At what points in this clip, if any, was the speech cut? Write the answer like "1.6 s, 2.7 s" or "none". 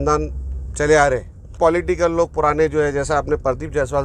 1.5 s